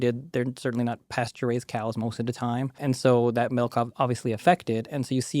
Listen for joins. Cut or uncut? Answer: cut